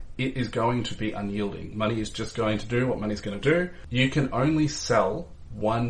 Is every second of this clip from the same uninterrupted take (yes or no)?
no